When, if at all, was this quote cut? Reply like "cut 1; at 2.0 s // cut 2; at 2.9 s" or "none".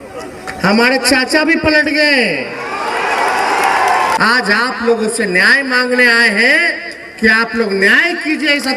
cut 1; at 4.2 s